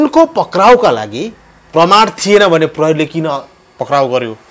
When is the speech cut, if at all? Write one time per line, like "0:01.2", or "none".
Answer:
none